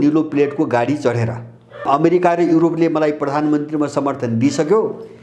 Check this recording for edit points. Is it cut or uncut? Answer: cut